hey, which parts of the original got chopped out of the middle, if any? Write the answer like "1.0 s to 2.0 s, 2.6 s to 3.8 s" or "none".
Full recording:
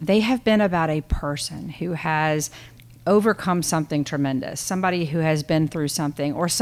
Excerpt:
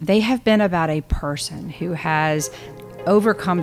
none